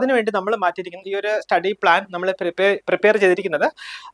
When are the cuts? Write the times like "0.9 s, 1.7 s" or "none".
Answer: 1.1 s

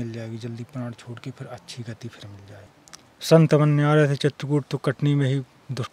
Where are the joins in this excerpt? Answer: 2.8 s

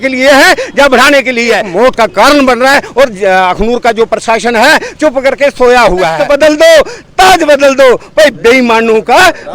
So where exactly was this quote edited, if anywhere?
1.7 s, 6.2 s

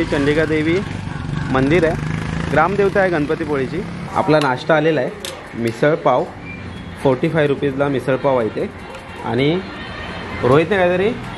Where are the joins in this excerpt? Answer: 4.0 s

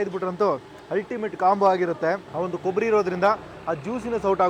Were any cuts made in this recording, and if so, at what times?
2.3 s

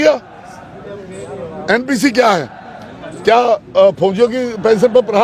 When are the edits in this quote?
none

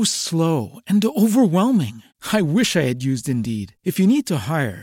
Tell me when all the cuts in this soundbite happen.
none

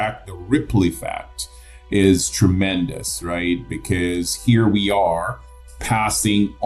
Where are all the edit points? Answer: none

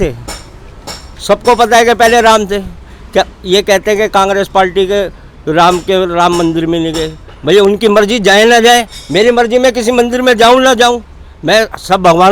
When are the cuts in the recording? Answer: none

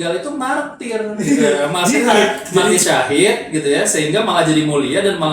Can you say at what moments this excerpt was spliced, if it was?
2.7 s

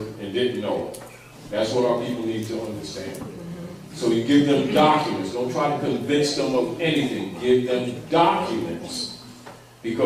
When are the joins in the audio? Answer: 8.6 s

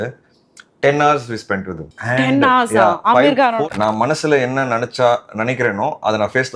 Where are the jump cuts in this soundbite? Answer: 1.8 s, 3.6 s

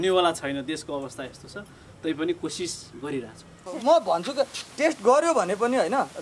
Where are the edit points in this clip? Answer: 3.7 s

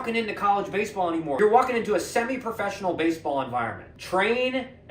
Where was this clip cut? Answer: 1.4 s, 3.9 s

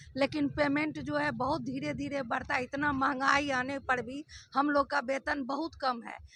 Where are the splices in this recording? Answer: none

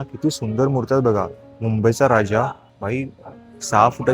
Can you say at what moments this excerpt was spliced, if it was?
none

